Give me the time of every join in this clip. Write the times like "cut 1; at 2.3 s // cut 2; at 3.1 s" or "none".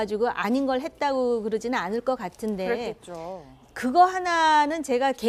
none